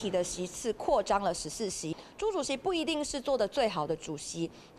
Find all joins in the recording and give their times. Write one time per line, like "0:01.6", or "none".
0:02.0